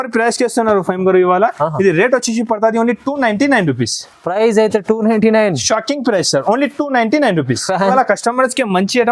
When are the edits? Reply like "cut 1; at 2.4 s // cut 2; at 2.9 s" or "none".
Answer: cut 1; at 7.9 s